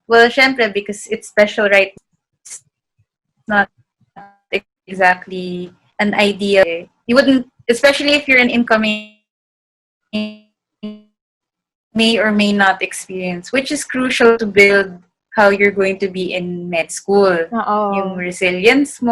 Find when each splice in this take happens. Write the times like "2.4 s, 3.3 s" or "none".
1.9 s